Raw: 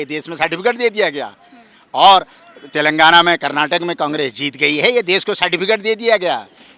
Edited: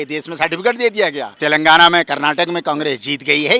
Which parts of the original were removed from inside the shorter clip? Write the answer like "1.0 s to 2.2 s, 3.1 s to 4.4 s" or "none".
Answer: 1.3 s to 2.6 s